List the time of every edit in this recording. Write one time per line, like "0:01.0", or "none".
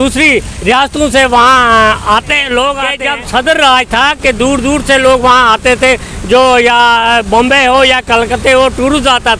0:02.9